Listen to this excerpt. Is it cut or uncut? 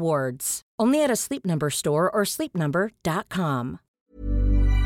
cut